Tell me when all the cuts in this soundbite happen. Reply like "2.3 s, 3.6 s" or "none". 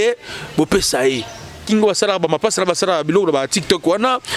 1.6 s